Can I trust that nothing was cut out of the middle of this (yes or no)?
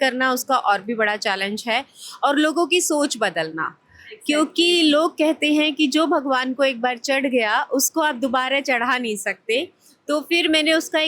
yes